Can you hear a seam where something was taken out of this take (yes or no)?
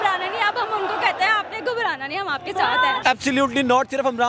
yes